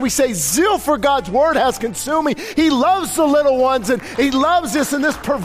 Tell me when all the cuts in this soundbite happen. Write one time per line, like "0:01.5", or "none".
none